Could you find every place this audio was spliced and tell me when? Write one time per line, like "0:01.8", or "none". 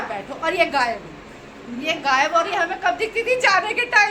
none